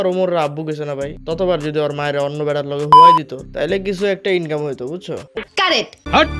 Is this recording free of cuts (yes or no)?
yes